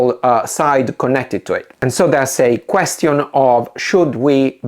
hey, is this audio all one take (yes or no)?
no